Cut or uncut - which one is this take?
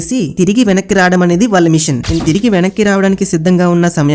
cut